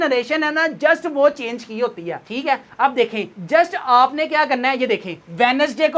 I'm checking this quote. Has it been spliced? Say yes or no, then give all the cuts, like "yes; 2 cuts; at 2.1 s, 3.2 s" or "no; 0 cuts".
no; 0 cuts